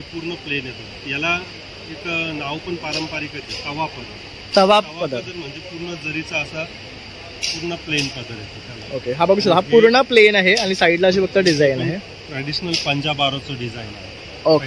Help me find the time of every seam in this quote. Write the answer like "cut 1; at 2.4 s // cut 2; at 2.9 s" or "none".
none